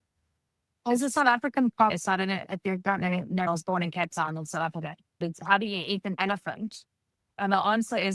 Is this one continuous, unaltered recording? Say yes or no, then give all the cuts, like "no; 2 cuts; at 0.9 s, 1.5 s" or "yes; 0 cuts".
no; 3 cuts; at 1.9 s, 3.5 s, 5.2 s